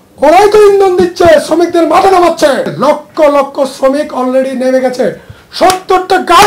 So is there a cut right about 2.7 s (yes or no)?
yes